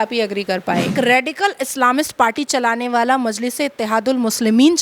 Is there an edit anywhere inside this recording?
yes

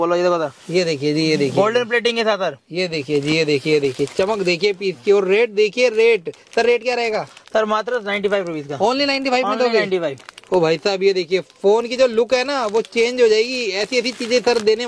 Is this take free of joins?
yes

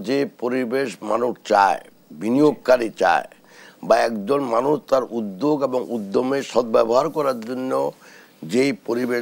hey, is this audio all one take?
yes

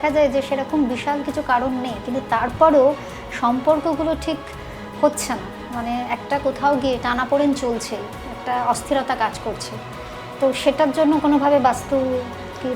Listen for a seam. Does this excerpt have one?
no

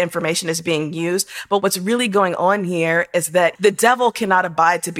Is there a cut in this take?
yes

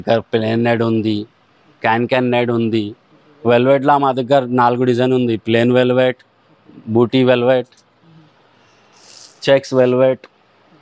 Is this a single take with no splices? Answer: yes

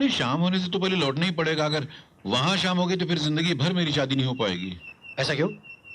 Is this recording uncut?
yes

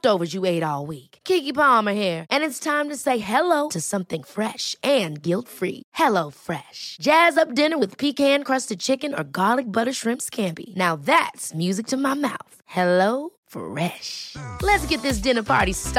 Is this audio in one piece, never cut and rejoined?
yes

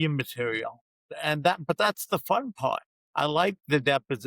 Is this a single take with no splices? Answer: no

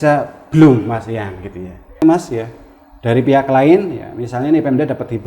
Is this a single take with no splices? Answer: no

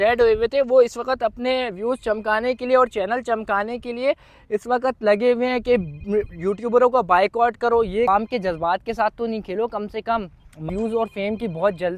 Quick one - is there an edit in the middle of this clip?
yes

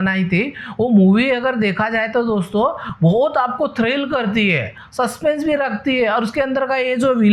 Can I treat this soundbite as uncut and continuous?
yes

